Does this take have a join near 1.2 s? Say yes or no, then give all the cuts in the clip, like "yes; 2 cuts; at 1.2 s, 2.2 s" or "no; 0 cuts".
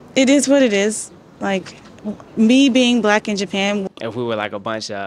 no; 1 cut; at 3.8 s